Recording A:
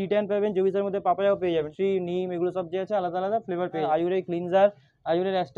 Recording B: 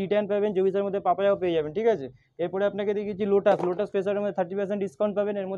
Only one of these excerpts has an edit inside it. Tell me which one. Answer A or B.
A